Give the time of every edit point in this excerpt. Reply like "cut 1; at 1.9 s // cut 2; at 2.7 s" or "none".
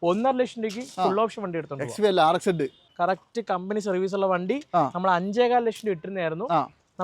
cut 1; at 2.9 s